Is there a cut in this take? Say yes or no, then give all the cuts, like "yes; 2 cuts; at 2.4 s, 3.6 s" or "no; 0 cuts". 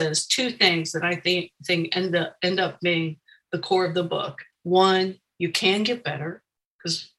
yes; 1 cut; at 4.4 s